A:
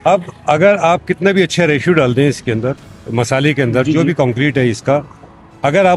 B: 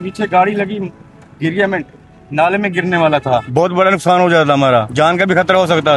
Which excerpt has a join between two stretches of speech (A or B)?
B